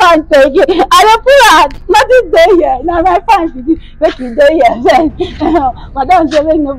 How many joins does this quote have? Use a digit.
0